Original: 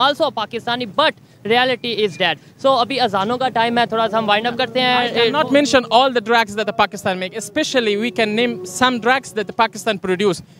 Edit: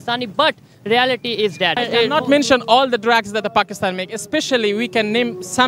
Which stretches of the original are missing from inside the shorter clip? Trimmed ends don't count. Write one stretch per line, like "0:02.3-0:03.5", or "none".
0:02.4-0:05.0